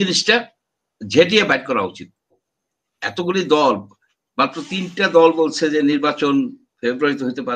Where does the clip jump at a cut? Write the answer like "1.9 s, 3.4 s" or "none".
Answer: 2.4 s